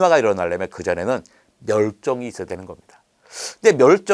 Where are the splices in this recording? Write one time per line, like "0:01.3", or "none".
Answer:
none

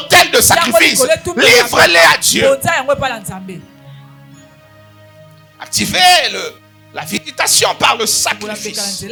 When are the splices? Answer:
none

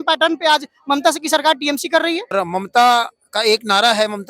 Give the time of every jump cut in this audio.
0:02.3

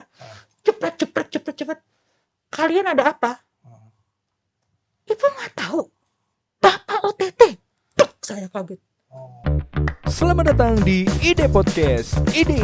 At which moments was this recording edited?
0:09.2

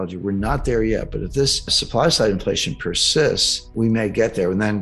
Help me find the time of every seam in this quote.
0:01.8
0:03.6

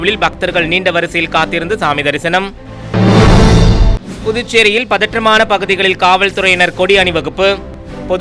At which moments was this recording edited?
none

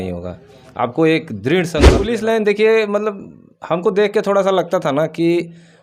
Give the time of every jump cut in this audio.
0:02.1

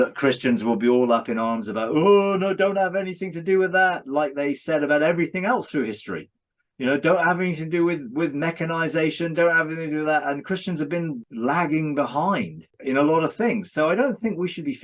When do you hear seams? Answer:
0:11.2
0:12.7

